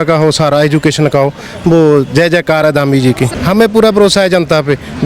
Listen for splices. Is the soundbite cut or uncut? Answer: cut